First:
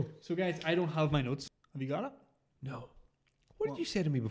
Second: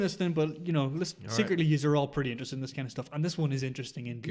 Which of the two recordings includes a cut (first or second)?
first